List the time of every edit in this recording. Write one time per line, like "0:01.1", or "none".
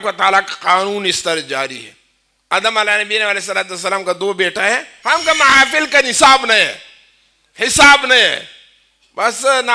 0:04.9